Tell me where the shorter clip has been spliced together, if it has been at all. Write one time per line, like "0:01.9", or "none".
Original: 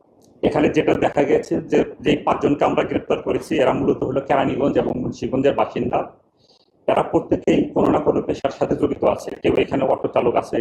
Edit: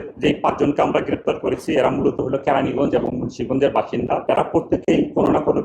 0:04.2